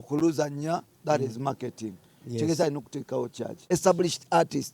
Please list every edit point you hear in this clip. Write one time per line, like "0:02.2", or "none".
0:03.7